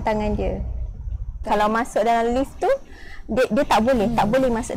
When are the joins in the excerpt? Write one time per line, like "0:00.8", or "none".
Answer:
0:01.4